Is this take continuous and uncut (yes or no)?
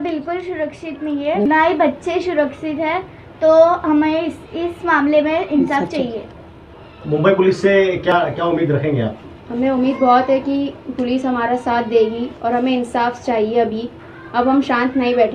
yes